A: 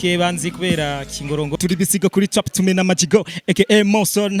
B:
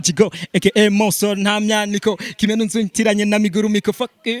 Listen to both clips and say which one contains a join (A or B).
A